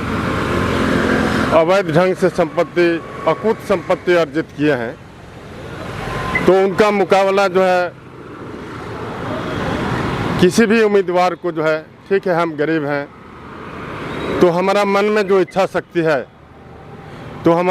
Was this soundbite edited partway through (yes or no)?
no